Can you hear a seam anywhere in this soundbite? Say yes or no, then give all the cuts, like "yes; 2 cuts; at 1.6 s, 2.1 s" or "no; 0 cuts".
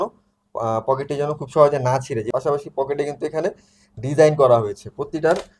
yes; 1 cut; at 2.3 s